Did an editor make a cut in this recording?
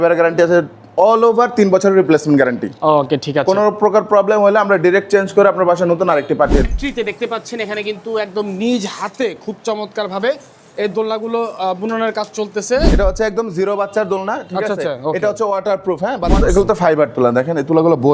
yes; 3 cuts; at 6.6 s, 12.9 s, 16.4 s

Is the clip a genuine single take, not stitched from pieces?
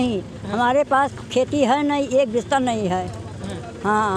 yes; 0 cuts

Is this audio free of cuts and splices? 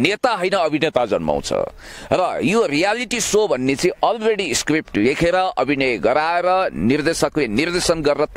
yes; 0 cuts

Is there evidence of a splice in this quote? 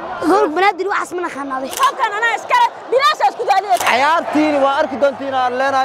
yes; 2 cuts; at 1.8 s, 3.8 s

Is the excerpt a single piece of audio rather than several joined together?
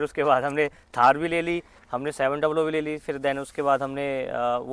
yes; 0 cuts

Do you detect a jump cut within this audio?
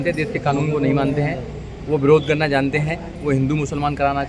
no; 0 cuts

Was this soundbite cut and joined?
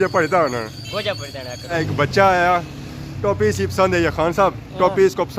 yes; 1 cut; at 1.8 s

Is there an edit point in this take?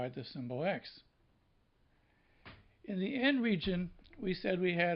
no; 0 cuts

